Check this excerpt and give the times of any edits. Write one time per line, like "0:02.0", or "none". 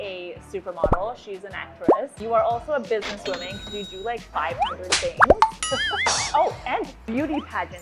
0:02.2

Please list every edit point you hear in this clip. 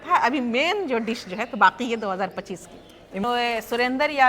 0:03.2

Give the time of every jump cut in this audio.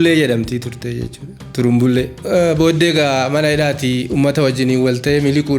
0:02.2

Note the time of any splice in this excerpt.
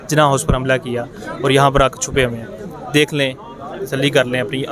none

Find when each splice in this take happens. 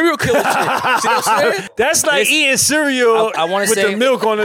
0:01.7

